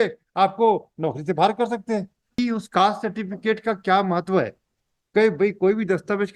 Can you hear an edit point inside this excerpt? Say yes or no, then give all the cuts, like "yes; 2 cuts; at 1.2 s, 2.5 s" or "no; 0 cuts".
yes; 1 cut; at 2.4 s